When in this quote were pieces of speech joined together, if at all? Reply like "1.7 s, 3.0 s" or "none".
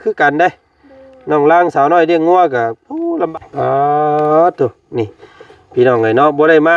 3.3 s